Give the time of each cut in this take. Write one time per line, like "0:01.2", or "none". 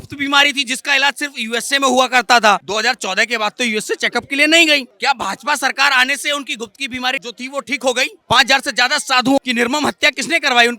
0:02.6
0:07.2
0:08.2